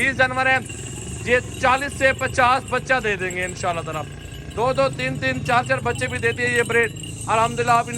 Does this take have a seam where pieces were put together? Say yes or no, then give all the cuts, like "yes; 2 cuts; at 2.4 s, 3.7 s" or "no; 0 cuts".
no; 0 cuts